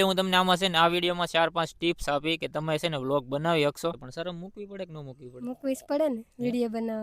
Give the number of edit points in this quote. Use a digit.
1